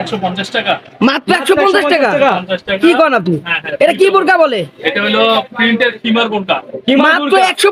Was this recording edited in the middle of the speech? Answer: no; 0 cuts

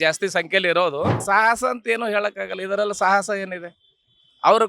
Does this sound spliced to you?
yes; 1 cut; at 1.2 s

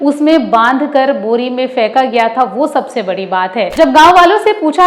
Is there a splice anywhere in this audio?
yes; 1 cut; at 3.7 s

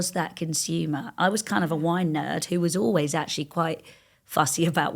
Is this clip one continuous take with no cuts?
yes; 0 cuts

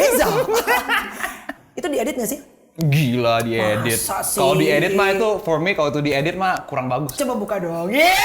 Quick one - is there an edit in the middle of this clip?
yes; 2 cuts; at 1.6 s, 7.1 s

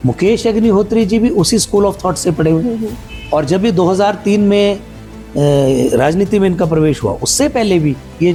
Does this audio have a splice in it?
no; 0 cuts

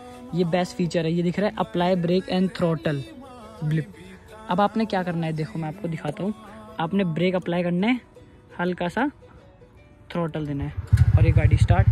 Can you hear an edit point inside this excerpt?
no; 0 cuts

